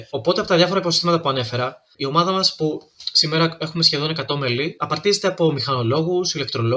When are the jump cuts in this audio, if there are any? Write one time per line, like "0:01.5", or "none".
0:01.9
0:04.8

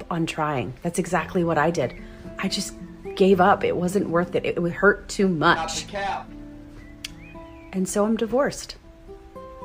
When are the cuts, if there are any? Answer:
none

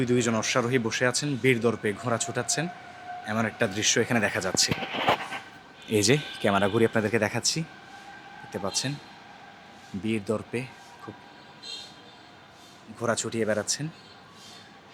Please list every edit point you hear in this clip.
none

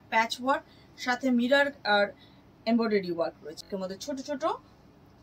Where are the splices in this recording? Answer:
0:03.7

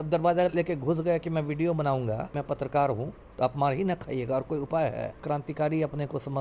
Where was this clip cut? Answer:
0:02.3
0:05.2

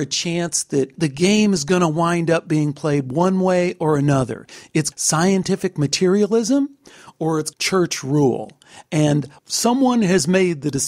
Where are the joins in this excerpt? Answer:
0:00.9
0:04.9
0:07.5
0:09.4

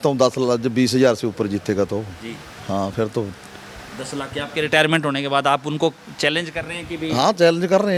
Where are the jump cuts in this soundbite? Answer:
none

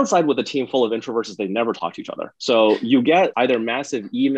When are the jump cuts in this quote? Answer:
0:02.3
0:03.3

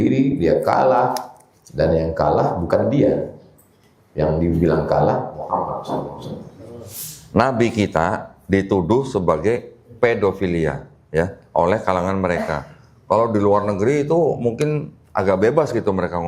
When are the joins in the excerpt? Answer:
0:06.9

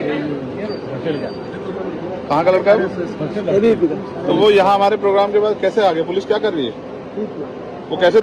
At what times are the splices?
none

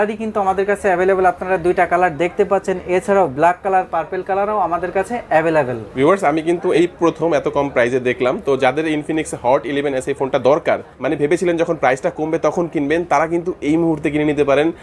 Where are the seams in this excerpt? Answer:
none

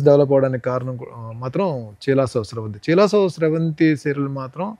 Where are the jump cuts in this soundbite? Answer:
none

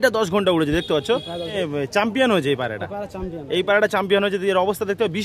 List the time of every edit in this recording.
0:01.5

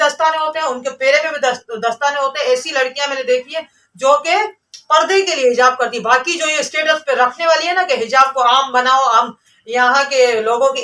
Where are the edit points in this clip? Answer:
none

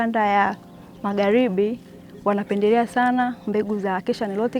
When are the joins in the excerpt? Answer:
none

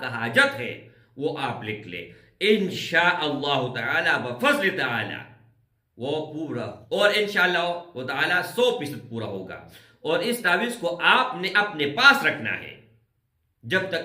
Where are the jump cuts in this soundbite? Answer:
0:06.8

